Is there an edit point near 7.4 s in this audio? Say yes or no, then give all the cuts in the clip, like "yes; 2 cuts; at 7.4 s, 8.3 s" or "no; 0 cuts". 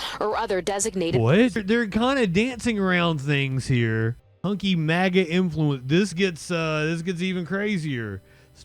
no; 2 cuts; at 1.6 s, 4.3 s